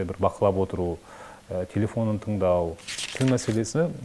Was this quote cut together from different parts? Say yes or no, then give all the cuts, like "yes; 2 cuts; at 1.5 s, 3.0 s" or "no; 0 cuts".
yes; 1 cut; at 3.1 s